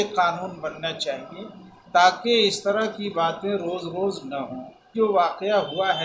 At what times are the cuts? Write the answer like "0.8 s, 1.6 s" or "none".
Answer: 4.9 s